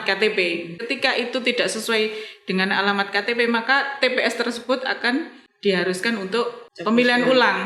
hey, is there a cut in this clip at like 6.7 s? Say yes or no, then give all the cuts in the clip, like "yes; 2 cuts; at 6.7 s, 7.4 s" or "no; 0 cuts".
yes; 3 cuts; at 0.8 s, 5.4 s, 6.7 s